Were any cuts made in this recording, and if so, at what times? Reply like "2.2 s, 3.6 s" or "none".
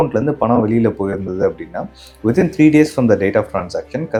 none